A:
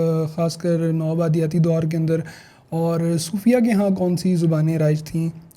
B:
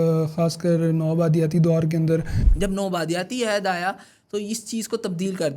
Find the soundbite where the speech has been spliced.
B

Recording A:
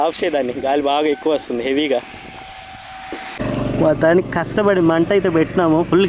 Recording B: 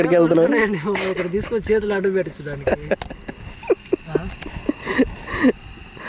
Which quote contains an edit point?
A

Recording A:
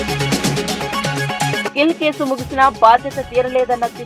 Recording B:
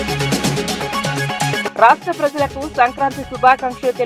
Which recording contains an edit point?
A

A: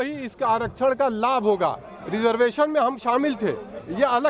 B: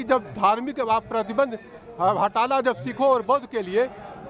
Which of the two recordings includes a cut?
A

